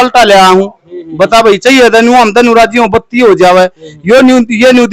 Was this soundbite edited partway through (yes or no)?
no